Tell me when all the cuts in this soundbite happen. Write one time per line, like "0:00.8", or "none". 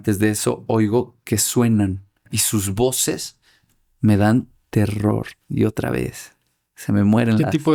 none